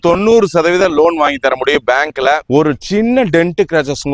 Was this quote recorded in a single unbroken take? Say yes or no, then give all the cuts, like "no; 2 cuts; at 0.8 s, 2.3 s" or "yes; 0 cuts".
no; 1 cut; at 2.4 s